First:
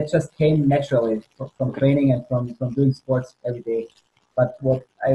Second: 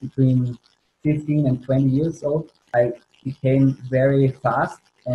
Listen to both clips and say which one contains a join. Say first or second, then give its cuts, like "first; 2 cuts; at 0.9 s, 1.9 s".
second; 1 cut; at 2.6 s